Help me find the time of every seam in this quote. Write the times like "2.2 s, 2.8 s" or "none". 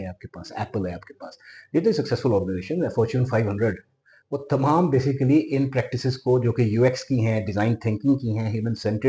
none